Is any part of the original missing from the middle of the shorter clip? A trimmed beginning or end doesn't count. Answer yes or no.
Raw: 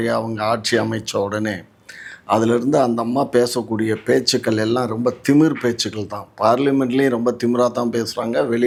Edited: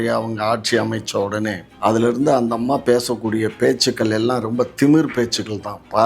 yes